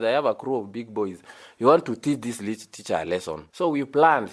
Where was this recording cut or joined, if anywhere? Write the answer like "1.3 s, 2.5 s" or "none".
none